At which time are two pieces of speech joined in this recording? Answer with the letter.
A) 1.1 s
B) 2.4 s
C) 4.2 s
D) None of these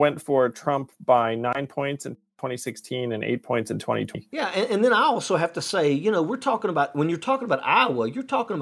C